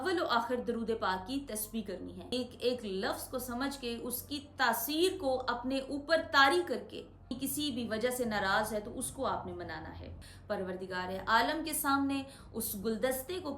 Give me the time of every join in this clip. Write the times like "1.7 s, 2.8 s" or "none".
2.3 s, 7.4 s, 10.3 s